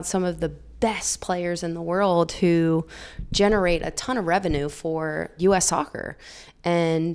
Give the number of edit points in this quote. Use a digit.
1